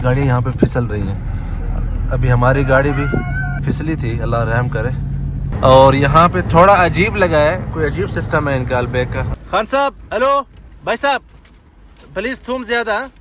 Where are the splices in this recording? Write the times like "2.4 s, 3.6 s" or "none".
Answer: 3.6 s, 5.5 s, 9.2 s